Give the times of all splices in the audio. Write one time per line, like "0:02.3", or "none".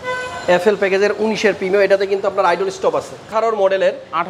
0:03.3